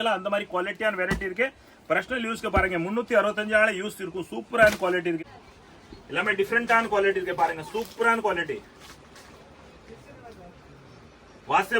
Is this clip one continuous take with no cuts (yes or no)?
no